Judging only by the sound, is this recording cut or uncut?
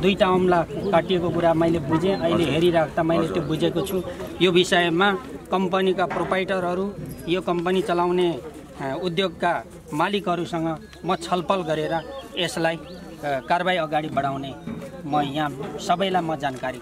uncut